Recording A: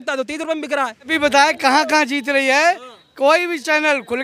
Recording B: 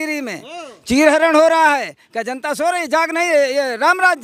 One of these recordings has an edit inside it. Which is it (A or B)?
A